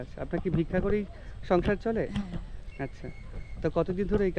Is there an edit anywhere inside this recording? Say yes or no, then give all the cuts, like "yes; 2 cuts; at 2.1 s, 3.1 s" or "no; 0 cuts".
no; 0 cuts